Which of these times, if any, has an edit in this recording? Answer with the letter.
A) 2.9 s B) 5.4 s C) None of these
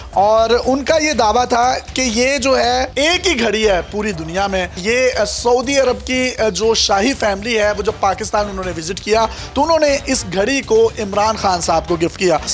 A